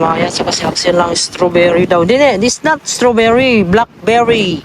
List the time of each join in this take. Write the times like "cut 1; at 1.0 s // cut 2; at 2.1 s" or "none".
none